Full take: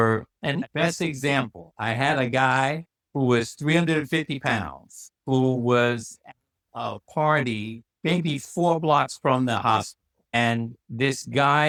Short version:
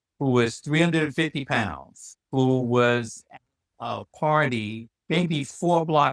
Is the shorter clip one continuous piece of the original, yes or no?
yes